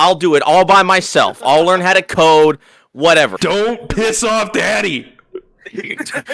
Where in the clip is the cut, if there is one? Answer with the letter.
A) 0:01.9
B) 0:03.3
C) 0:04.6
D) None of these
B